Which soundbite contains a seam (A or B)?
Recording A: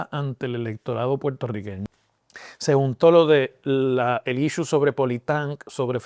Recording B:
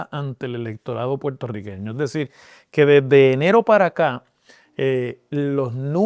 A